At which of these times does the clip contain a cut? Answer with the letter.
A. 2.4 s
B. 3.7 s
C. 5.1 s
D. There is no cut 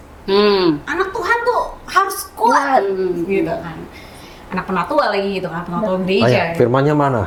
D